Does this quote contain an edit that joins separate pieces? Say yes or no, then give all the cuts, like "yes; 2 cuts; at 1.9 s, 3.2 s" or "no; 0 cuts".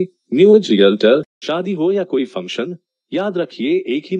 yes; 1 cut; at 1.4 s